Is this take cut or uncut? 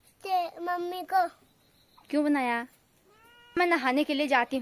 cut